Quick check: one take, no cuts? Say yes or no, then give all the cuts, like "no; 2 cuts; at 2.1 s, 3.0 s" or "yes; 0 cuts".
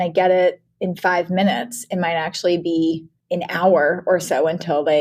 no; 1 cut; at 3.1 s